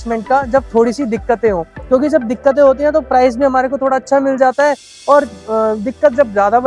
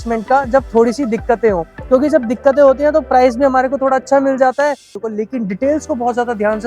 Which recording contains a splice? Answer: second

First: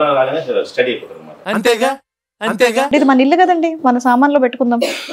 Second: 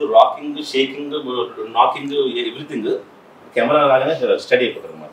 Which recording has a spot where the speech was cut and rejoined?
first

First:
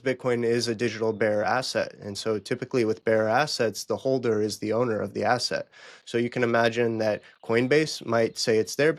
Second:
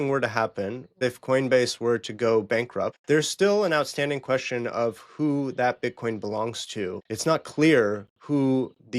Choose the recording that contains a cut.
second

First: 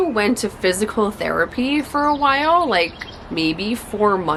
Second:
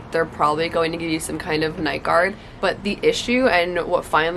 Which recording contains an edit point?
second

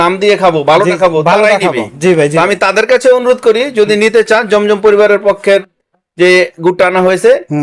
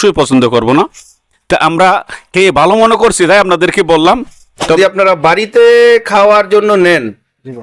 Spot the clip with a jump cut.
second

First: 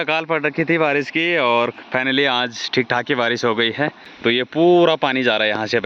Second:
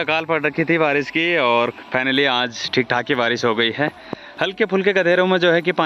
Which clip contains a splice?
first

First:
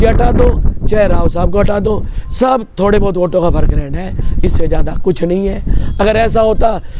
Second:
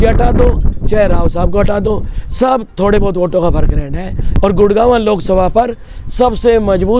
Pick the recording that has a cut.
second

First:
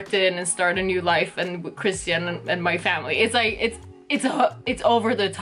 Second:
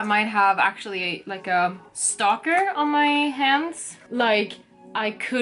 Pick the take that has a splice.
second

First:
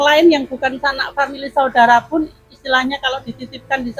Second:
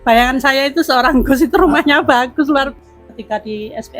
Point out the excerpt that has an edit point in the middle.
second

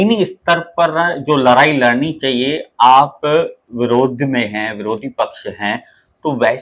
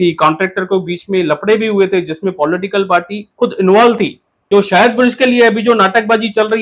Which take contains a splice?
second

